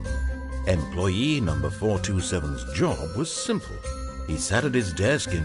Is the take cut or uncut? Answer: uncut